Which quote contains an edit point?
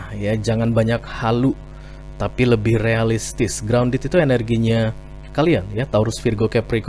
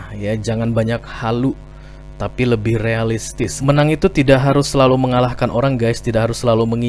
second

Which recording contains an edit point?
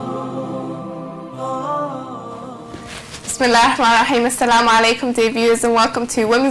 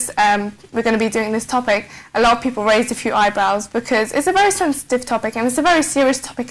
second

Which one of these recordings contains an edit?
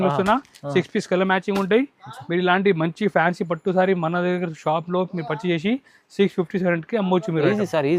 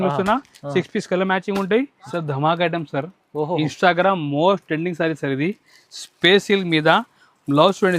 second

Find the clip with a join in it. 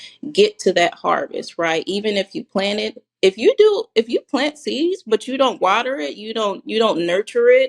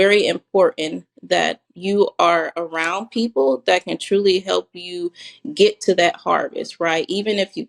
second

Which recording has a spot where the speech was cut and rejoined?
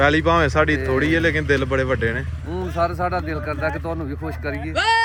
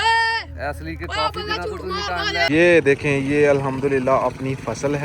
second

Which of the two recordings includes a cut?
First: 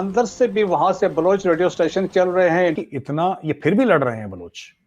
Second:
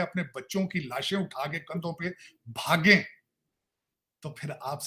first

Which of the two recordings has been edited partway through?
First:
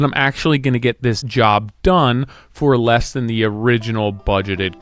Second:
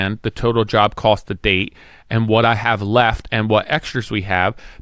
first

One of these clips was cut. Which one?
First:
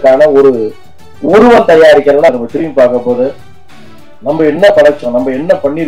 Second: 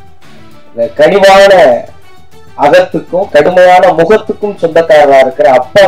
first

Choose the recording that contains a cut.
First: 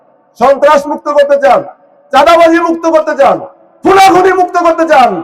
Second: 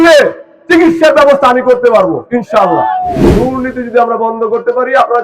second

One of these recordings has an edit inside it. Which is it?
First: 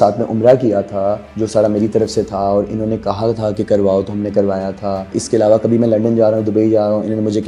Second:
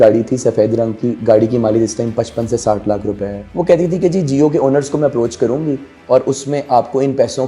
second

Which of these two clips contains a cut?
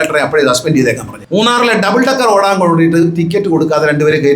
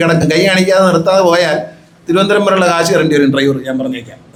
first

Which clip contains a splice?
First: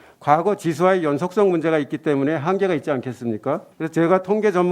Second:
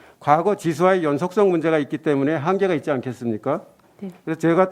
first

